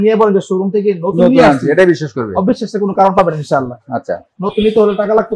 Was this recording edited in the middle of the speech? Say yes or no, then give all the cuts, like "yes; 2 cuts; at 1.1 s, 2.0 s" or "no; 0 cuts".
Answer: no; 0 cuts